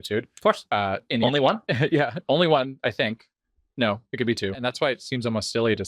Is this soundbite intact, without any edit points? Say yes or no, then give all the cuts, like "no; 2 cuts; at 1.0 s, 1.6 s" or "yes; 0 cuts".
no; 1 cut; at 4.6 s